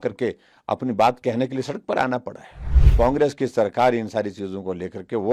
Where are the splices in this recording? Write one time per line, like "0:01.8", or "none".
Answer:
0:02.8